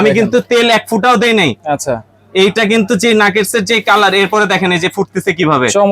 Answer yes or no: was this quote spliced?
no